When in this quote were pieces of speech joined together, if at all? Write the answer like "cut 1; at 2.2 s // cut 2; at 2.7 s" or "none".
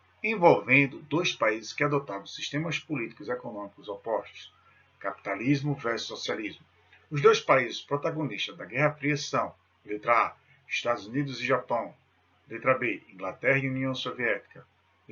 cut 1; at 13.3 s